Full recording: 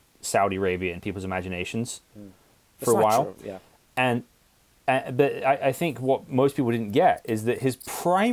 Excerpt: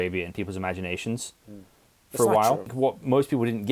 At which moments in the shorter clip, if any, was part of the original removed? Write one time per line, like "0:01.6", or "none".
0:02.7